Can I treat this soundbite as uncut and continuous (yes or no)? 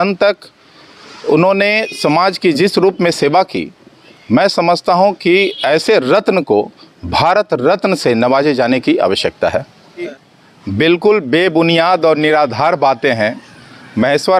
no